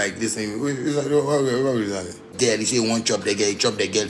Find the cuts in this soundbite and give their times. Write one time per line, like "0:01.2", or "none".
0:02.3